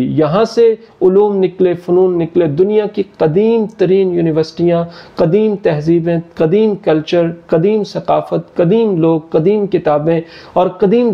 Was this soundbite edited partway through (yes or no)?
no